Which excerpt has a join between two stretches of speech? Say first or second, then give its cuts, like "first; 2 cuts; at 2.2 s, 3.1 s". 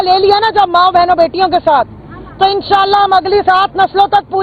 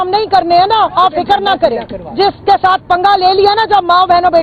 second; 1 cut; at 2.0 s